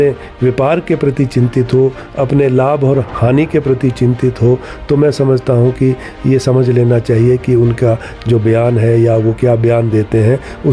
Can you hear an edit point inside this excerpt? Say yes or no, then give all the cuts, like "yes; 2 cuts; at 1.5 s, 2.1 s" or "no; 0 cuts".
no; 0 cuts